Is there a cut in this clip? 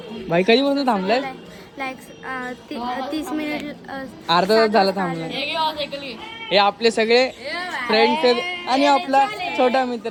no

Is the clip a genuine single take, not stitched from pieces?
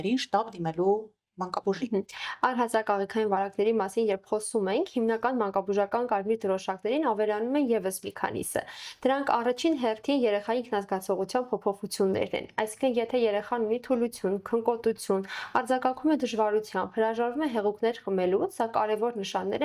yes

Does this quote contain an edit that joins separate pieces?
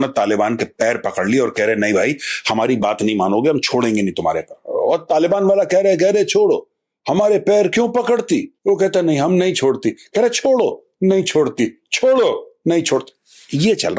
no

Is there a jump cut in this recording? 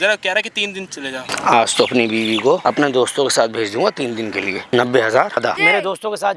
yes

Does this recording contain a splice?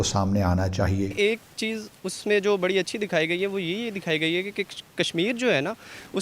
yes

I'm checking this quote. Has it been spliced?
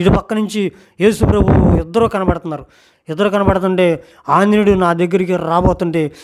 no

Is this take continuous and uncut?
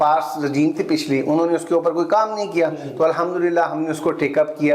yes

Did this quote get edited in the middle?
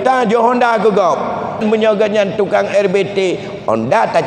yes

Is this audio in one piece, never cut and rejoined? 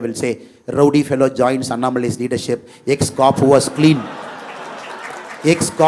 yes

